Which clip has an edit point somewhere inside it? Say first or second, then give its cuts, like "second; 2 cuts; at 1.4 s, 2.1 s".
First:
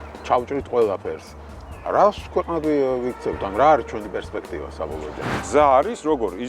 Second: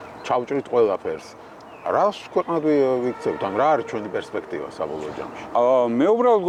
first; 1 cut; at 5.3 s